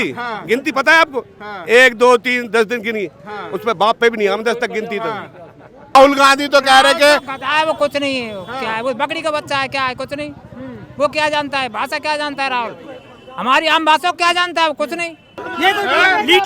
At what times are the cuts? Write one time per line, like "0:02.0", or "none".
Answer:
0:06.0
0:15.4